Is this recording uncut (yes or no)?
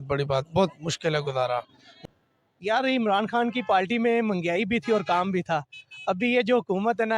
no